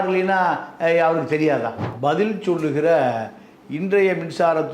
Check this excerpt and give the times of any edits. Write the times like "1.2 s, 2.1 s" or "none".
1.8 s